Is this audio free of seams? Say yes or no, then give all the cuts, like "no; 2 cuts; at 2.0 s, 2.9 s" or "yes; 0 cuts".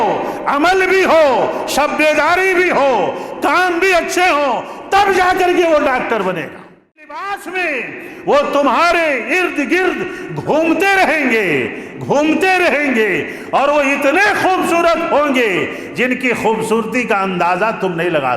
no; 1 cut; at 7.1 s